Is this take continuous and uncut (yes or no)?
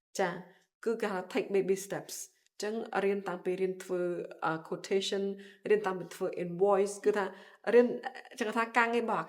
yes